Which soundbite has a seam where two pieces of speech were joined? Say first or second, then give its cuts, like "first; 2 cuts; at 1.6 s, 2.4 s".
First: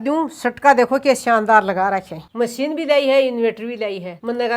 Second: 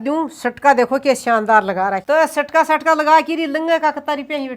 first; 1 cut; at 2.0 s